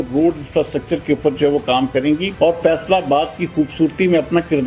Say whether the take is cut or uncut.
cut